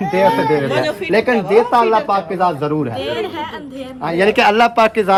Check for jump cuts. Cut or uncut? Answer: uncut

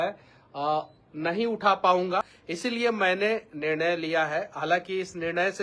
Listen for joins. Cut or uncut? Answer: cut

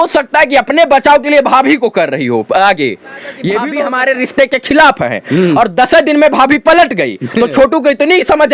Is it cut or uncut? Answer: cut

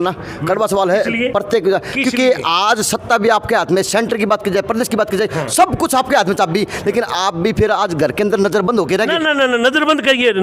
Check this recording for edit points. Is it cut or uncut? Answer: uncut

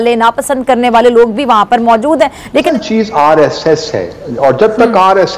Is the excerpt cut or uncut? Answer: cut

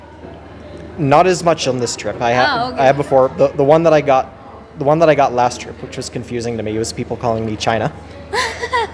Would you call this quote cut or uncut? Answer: uncut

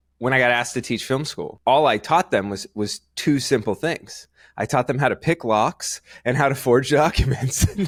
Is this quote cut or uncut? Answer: uncut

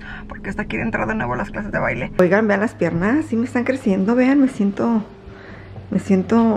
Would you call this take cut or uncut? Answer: cut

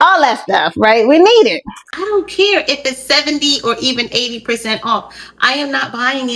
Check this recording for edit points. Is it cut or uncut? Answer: cut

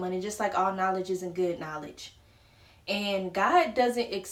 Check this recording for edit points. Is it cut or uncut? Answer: uncut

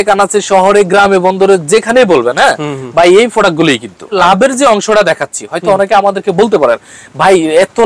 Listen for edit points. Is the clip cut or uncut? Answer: cut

